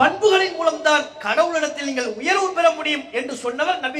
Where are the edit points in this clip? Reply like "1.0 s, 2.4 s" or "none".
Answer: 1.2 s